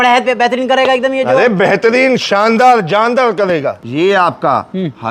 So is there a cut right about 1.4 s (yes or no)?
no